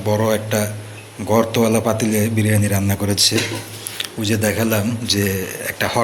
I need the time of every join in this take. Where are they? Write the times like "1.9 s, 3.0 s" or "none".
none